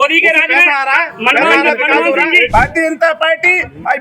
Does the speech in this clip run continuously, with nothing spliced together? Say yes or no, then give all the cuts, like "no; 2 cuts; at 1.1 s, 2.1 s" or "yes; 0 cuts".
no; 1 cut; at 2.5 s